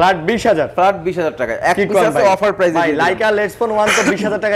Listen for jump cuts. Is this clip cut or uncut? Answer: uncut